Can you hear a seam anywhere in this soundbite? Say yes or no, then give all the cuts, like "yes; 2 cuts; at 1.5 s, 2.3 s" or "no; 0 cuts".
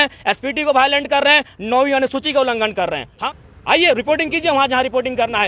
yes; 1 cut; at 3.1 s